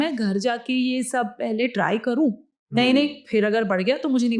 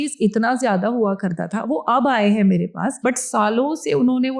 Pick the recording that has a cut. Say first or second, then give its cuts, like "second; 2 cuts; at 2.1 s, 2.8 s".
second; 1 cut; at 2.9 s